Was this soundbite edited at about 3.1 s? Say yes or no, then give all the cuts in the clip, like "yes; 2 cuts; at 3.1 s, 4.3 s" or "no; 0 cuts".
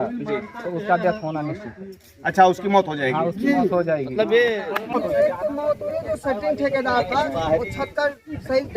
no; 1 cut; at 4.9 s